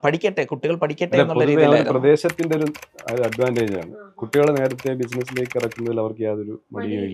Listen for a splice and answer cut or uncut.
uncut